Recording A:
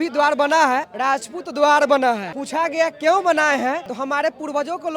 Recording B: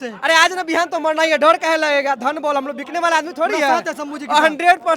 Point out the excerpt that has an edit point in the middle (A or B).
A